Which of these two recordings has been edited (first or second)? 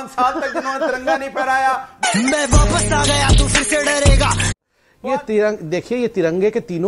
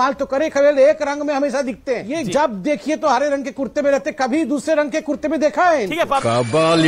first